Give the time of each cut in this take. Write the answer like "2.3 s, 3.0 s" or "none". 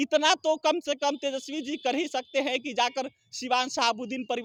none